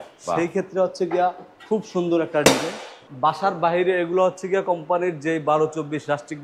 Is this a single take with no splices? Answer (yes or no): no